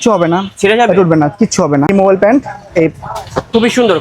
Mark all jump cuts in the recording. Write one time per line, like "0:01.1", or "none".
0:01.9